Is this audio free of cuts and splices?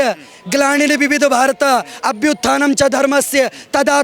yes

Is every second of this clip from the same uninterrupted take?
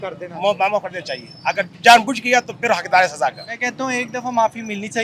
no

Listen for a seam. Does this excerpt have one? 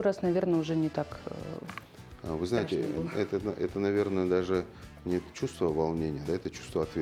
no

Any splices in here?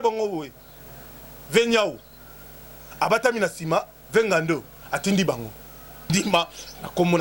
yes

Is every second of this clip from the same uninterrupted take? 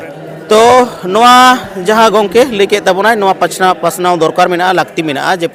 yes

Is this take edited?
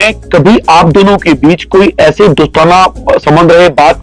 no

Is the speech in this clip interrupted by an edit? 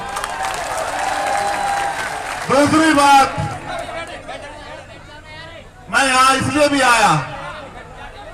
no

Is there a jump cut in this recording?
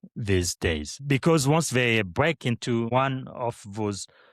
yes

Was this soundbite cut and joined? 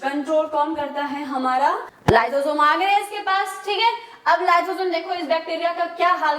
yes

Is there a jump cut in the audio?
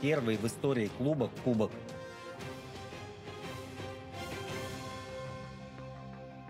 yes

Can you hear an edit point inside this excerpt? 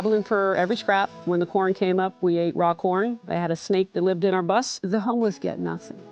yes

